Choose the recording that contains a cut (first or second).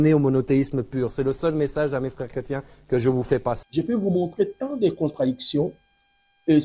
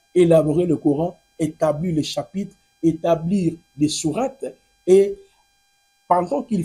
first